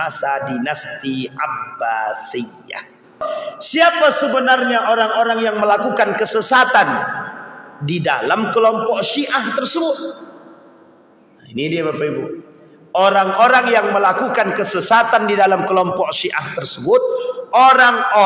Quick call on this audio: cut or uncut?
cut